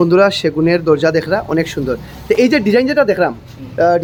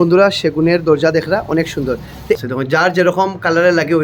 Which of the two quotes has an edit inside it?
second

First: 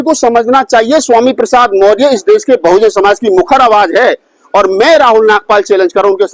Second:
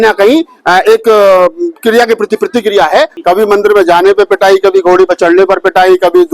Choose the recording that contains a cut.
second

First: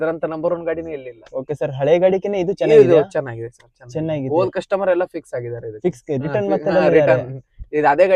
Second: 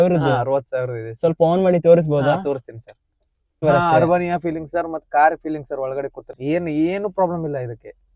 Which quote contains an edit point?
second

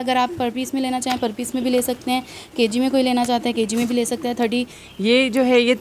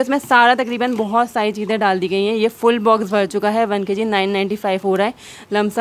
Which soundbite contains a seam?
first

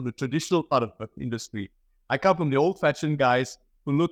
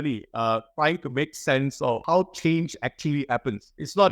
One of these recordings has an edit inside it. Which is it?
second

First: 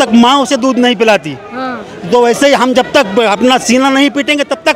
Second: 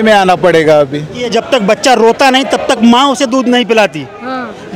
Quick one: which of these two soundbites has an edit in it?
second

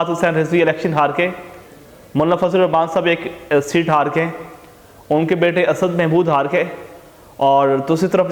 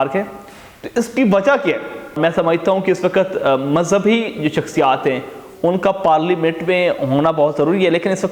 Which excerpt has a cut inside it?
second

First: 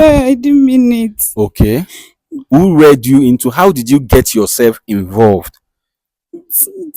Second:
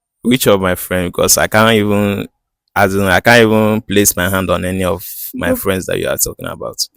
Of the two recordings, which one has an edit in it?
first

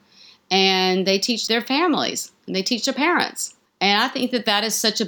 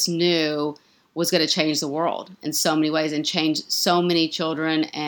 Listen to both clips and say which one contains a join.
first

